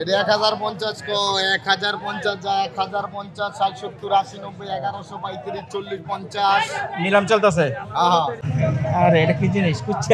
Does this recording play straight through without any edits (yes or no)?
no